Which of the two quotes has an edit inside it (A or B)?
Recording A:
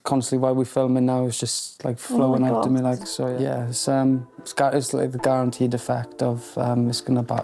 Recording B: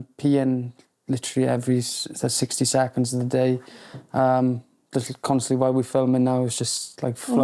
A